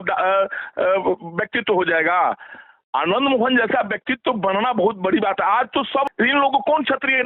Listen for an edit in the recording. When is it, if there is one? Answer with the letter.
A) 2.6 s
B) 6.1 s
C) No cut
B